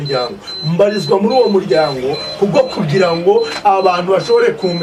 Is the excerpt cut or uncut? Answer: uncut